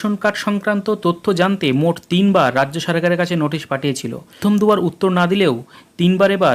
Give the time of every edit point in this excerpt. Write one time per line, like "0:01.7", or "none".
0:04.4